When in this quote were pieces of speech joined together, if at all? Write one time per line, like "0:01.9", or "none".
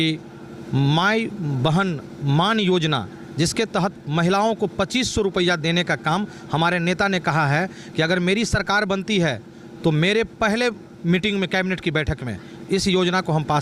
none